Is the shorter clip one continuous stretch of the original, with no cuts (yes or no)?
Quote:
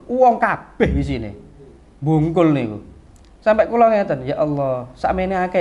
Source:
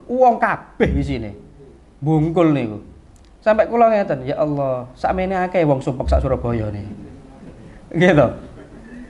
yes